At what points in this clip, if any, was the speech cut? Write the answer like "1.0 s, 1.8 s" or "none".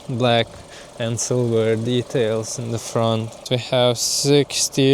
3.4 s